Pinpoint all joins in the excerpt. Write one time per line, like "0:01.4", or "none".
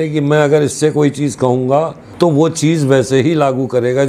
0:02.0